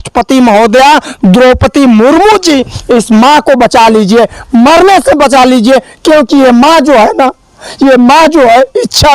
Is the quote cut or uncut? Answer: uncut